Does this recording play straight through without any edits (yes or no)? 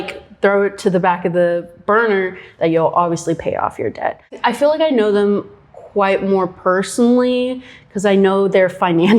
no